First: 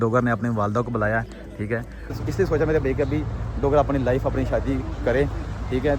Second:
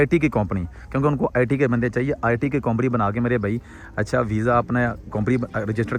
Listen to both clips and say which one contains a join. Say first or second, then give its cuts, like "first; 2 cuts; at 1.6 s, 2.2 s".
first; 1 cut; at 2.1 s